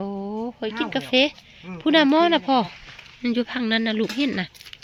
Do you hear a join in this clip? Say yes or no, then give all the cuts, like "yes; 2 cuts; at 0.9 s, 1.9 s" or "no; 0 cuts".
no; 0 cuts